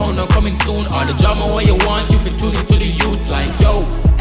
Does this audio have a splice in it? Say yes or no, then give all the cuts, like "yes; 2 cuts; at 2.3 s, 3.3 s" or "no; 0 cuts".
no; 0 cuts